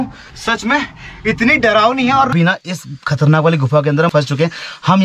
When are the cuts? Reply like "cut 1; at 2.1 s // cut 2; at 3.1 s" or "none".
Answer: cut 1; at 2.3 s // cut 2; at 4.1 s